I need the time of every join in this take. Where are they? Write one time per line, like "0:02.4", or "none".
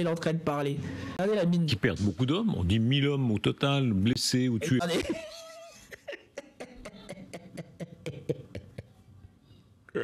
0:01.2